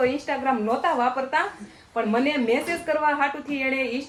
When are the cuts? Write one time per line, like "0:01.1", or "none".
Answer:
none